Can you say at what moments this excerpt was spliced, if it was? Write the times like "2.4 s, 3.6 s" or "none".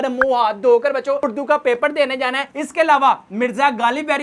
none